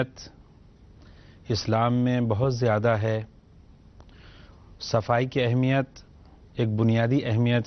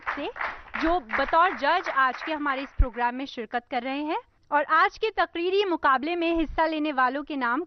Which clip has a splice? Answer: first; 1 cut; at 1.5 s

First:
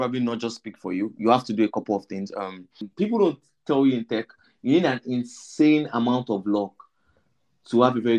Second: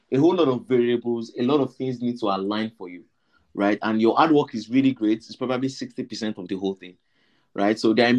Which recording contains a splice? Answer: first; 1 cut; at 2.8 s

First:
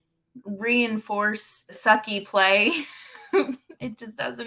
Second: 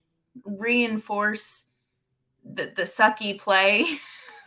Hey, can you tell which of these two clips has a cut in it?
first; 1 cut; at 1.8 s

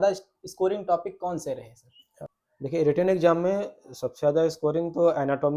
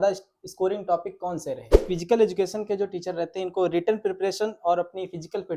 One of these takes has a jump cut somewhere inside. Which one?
second; 1 cut; at 1.8 s

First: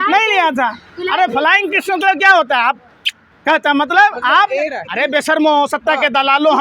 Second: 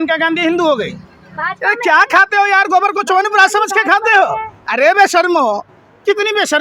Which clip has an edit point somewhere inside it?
first; 1 cut; at 4.8 s

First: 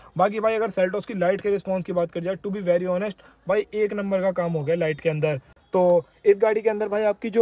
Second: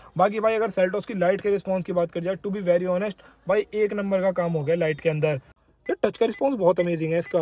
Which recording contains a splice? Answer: second; 1 cut; at 5.6 s

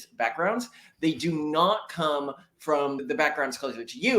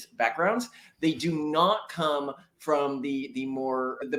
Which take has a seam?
first; 1 cut; at 3.0 s

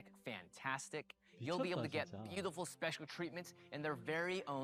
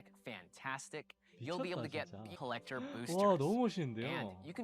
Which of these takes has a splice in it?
second; 1 cut; at 2.3 s

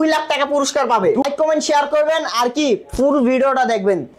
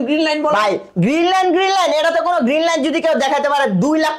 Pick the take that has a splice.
first; 1 cut; at 1.2 s

